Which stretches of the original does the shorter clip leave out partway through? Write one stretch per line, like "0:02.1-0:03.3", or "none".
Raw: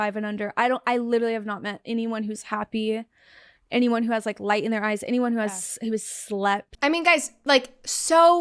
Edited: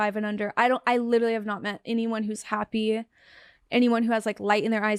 none